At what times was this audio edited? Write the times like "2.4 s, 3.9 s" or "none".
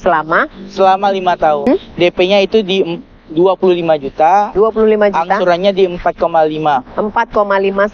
1.6 s